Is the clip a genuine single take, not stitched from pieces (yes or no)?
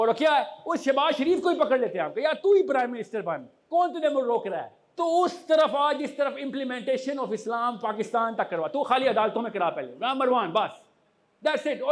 no